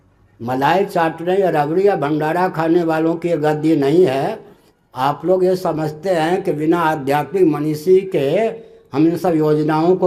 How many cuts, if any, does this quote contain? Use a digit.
0